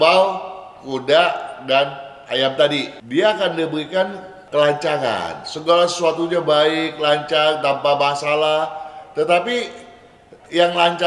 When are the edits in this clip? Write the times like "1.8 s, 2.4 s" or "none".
3.0 s